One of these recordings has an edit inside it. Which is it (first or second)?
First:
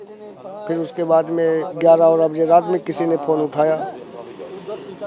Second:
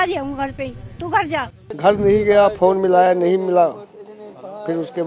second